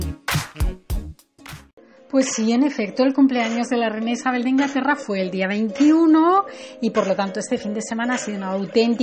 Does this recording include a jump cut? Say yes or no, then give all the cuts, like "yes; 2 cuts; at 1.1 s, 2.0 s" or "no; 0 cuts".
yes; 1 cut; at 7.3 s